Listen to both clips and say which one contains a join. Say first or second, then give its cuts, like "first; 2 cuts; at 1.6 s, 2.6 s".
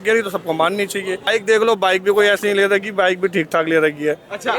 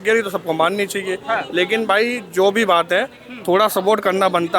first; 1 cut; at 1.2 s